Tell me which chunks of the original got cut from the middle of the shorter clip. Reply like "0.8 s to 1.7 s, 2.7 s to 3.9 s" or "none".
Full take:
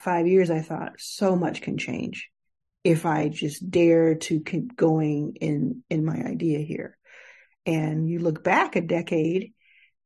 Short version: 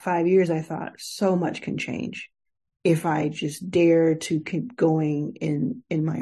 none